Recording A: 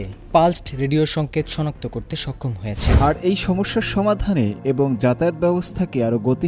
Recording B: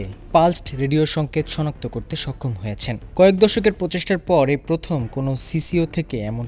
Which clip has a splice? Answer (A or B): A